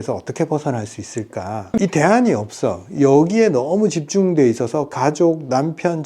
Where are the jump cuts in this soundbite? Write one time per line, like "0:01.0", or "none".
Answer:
0:01.8